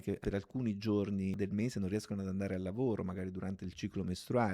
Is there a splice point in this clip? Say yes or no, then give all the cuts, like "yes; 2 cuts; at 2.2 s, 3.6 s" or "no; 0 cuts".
yes; 1 cut; at 1.4 s